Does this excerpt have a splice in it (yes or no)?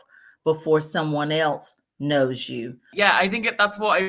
yes